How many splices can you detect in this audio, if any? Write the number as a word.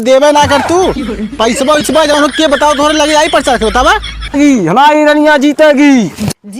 one